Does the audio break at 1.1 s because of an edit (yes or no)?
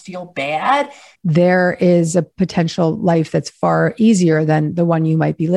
yes